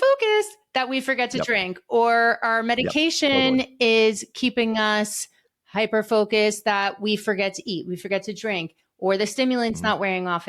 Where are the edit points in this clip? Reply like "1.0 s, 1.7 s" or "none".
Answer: none